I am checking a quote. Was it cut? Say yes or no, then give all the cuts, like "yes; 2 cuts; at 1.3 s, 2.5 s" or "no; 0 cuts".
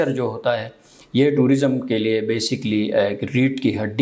no; 0 cuts